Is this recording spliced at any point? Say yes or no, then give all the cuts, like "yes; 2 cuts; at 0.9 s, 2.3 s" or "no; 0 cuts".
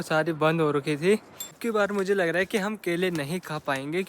yes; 1 cut; at 1.3 s